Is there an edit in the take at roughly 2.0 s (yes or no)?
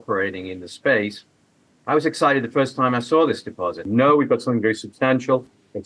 no